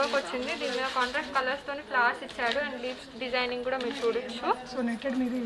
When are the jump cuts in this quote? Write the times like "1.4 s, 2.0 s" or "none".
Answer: none